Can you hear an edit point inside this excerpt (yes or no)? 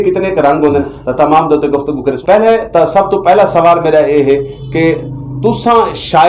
yes